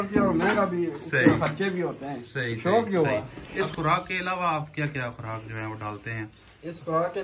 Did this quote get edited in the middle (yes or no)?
yes